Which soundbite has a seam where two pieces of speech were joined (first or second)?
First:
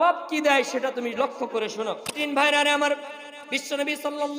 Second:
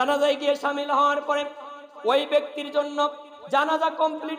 first